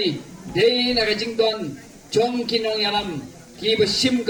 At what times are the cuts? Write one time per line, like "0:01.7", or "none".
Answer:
none